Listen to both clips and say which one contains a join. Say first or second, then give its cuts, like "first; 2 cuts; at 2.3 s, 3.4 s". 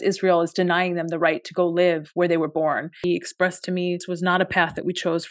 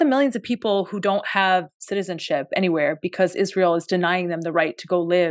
first; 2 cuts; at 2.9 s, 4.1 s